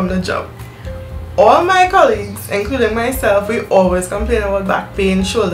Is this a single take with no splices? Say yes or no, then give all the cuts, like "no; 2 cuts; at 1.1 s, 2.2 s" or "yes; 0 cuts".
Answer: yes; 0 cuts